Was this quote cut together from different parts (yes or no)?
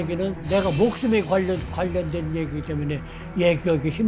no